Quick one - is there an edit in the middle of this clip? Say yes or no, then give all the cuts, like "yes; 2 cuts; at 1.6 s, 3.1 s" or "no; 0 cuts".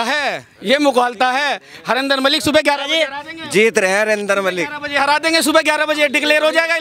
no; 0 cuts